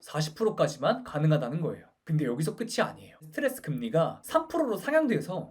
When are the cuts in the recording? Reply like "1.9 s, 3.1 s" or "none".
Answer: 1.9 s, 3.2 s